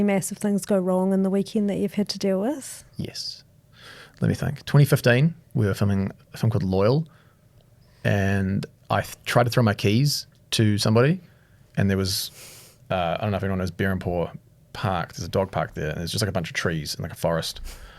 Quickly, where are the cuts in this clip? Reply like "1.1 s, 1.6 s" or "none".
5.4 s